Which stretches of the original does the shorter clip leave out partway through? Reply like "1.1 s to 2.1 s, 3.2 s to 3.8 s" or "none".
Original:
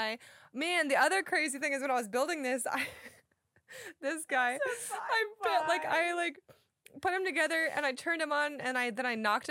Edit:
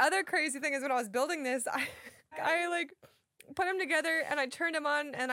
3.4 s to 5.8 s